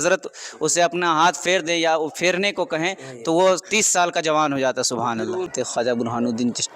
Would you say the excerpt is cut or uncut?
cut